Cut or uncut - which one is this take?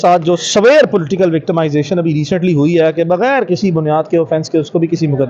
uncut